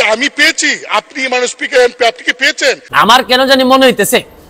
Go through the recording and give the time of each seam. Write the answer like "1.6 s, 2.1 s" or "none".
2.8 s

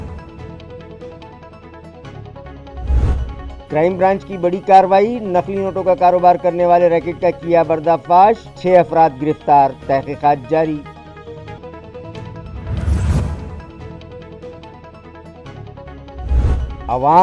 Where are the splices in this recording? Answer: none

